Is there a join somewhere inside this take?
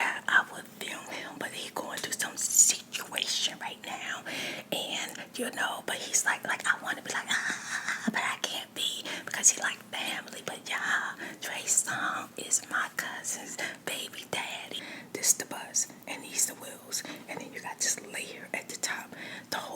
yes; 1 cut; at 14.8 s

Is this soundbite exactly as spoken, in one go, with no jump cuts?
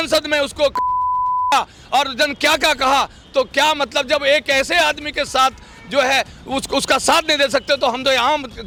yes; 0 cuts

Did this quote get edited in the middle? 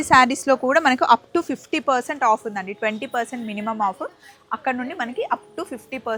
no; 0 cuts

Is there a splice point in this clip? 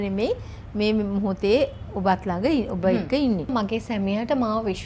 yes; 1 cut; at 3.5 s

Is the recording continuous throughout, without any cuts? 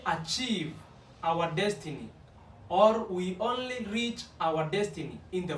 yes; 0 cuts

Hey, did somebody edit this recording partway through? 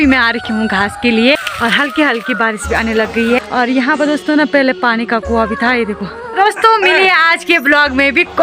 yes; 3 cuts; at 1.5 s, 3.4 s, 6.3 s

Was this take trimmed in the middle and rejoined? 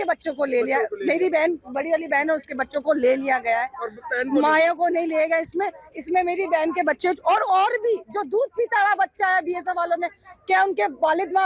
no; 0 cuts

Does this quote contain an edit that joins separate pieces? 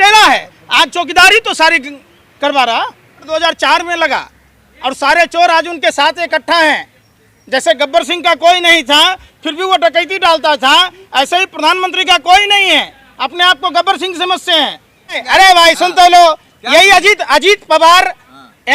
yes; 2 cuts; at 3.3 s, 15.2 s

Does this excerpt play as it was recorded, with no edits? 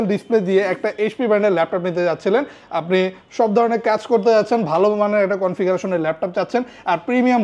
yes; 0 cuts

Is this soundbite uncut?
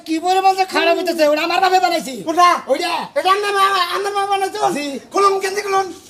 yes; 0 cuts

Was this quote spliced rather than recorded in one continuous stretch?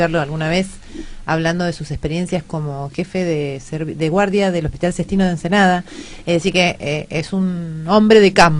yes; 1 cut; at 6.5 s

